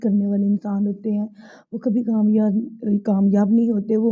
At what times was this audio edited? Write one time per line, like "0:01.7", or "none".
none